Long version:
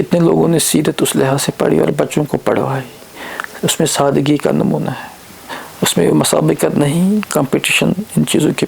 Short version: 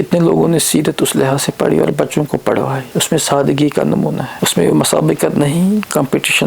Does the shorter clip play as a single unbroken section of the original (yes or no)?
no